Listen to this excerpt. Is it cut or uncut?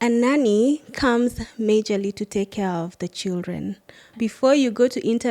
cut